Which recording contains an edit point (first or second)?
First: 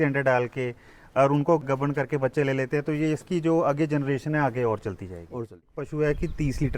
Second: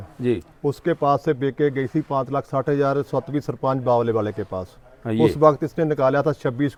first